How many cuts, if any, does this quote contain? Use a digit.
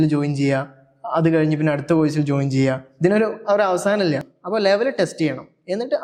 0